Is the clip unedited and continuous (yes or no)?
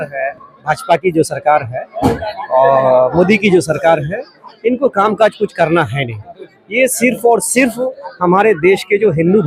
yes